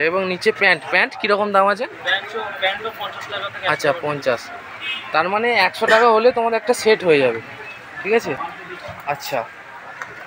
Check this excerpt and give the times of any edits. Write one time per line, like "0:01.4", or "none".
none